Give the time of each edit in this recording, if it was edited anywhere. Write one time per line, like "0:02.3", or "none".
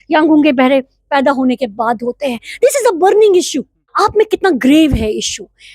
0:03.9

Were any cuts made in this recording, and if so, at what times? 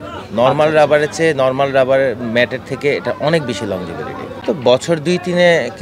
0:04.3

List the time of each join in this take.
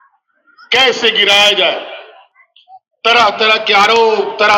none

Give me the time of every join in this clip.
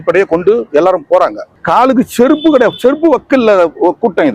0:01.5

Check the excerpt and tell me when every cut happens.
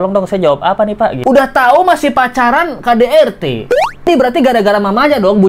0:01.2

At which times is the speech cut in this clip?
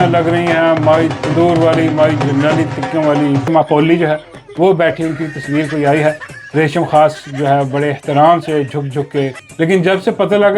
0:03.5
0:09.4

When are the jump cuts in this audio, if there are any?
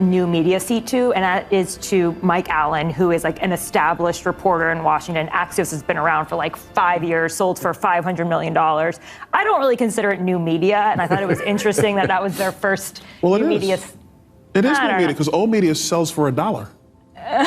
none

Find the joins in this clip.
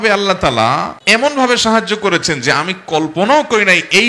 0:00.9

